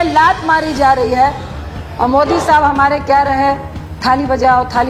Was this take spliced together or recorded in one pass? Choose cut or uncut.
uncut